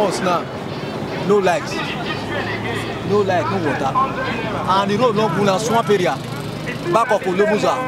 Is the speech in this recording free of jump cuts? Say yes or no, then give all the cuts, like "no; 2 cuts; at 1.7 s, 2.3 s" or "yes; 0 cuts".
yes; 0 cuts